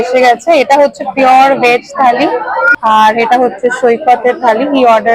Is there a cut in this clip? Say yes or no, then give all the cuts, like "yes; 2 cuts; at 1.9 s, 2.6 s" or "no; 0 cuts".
yes; 1 cut; at 2.7 s